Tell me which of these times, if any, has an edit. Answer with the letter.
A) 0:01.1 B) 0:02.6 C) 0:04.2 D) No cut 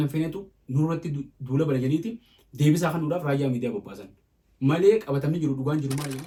D